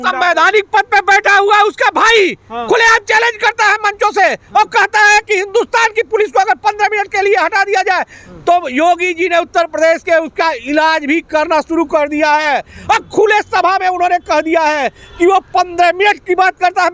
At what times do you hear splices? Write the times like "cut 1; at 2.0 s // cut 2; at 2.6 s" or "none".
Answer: none